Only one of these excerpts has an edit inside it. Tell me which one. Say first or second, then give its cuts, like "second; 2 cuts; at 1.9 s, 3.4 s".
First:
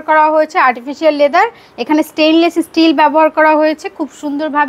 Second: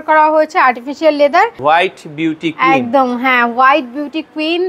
second; 1 cut; at 1.6 s